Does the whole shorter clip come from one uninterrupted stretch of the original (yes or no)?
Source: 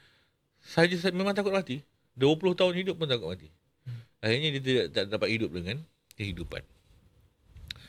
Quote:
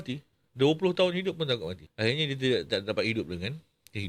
no